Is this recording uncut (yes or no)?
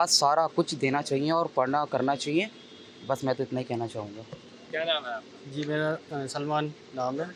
yes